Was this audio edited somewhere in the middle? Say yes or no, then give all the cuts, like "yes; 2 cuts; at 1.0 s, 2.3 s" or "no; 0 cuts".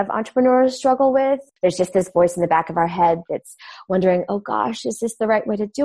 yes; 1 cut; at 1.5 s